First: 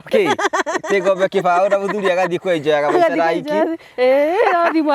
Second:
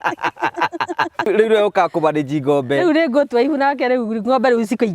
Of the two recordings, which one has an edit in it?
second; 1 cut; at 1.3 s

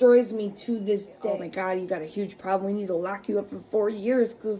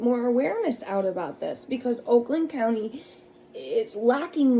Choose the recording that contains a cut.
first; 1 cut; at 1.2 s

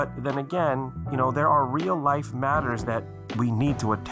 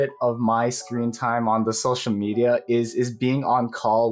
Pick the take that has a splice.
first; 1 cut; at 1.0 s

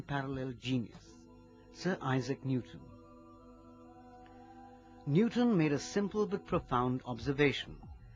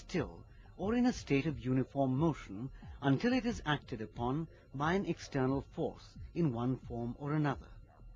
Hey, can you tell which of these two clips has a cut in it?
first; 1 cut; at 1.5 s

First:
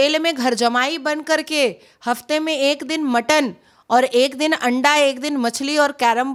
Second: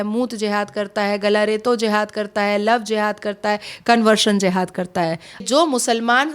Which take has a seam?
second; 1 cut; at 5.4 s

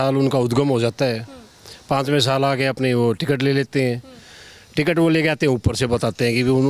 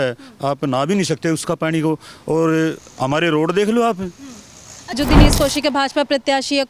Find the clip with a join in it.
second; 1 cut; at 5.0 s

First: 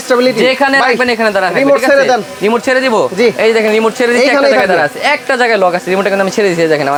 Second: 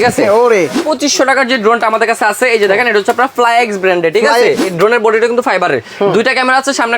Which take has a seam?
second; 2 cuts; at 0.9 s, 4.7 s

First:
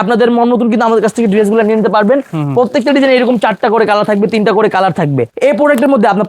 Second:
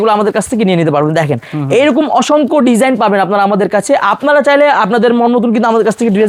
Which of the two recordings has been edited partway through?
first; 1 cut; at 5.3 s

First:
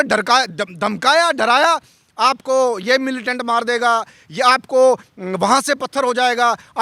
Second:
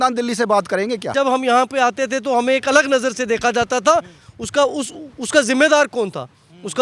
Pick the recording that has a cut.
second; 1 cut; at 1.1 s

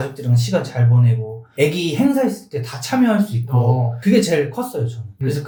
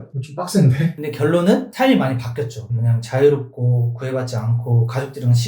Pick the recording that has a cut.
second; 1 cut; at 0.9 s

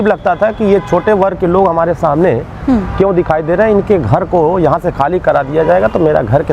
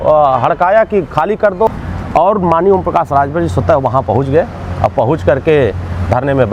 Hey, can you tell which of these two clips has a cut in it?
second; 1 cut; at 1.7 s

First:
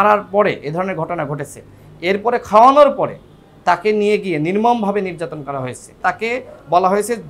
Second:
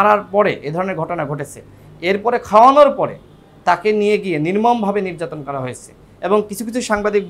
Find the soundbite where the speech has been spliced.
first; 1 cut; at 6.0 s

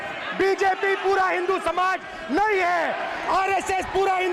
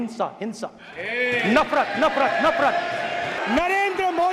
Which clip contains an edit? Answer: second; 1 cut; at 3.4 s

